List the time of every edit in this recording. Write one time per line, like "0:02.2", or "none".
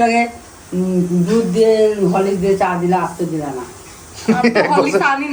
none

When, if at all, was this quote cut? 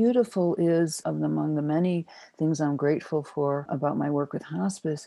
0:01.0
0:03.7

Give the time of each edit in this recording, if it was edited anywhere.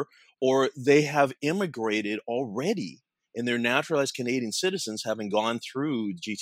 none

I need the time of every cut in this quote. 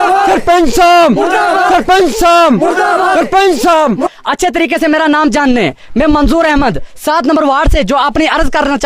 0:04.1

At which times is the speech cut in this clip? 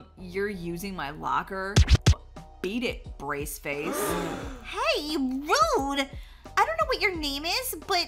0:02.1

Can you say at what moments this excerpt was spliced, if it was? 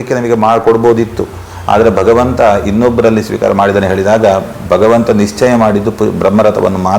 none

